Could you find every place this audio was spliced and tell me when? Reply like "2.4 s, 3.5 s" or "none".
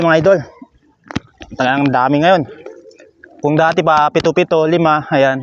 none